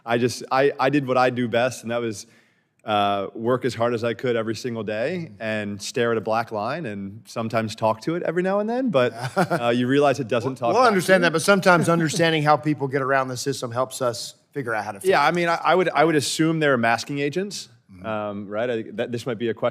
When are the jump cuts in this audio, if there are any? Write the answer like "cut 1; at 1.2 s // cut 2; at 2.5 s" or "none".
none

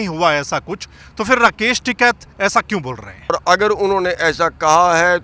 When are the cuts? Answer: cut 1; at 3.3 s

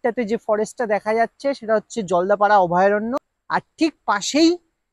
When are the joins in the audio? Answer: cut 1; at 3.3 s

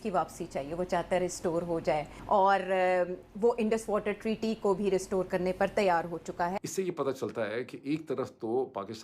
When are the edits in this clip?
cut 1; at 6.6 s

